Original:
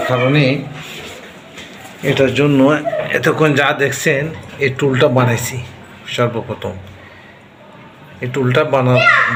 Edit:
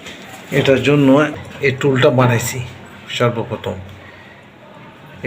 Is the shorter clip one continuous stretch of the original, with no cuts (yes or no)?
no